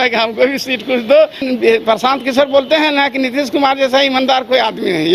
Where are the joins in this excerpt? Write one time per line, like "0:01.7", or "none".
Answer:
0:01.4